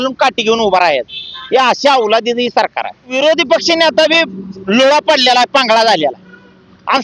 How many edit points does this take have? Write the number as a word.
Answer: one